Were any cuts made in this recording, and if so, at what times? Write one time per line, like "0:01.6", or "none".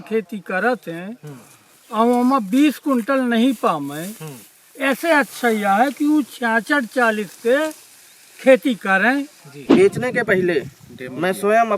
0:09.3